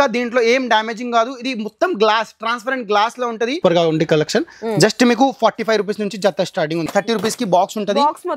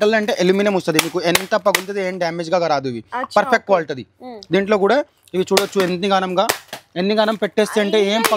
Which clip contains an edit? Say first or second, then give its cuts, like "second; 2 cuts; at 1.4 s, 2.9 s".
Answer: first; 2 cuts; at 3.6 s, 6.9 s